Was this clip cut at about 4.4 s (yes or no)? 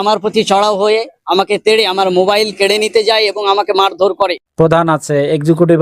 yes